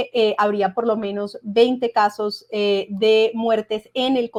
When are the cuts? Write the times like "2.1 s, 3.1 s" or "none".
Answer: none